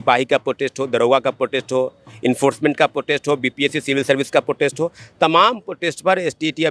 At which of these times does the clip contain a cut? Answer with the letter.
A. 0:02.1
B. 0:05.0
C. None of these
C